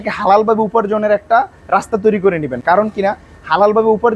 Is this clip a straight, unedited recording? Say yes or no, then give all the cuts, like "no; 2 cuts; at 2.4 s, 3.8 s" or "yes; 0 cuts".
yes; 0 cuts